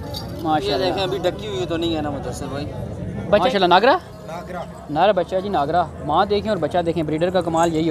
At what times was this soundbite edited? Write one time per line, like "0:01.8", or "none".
0:03.5